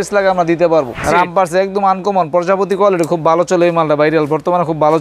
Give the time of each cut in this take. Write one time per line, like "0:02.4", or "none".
0:01.0

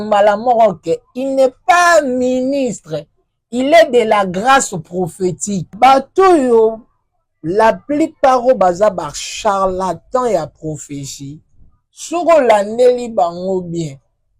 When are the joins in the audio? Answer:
0:05.7

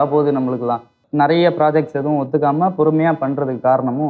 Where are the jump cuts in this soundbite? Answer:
0:01.0

